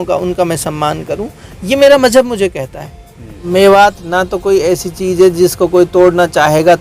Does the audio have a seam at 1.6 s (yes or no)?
no